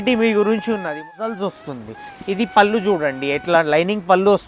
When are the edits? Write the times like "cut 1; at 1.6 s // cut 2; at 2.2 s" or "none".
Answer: cut 1; at 1.3 s